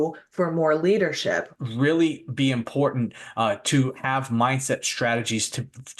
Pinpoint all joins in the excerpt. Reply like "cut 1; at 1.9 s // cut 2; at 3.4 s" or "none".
cut 1; at 1.5 s